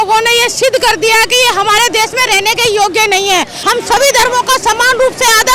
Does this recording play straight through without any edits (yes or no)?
no